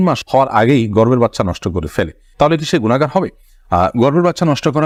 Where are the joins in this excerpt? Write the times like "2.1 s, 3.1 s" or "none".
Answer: none